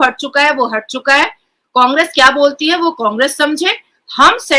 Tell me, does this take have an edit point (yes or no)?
no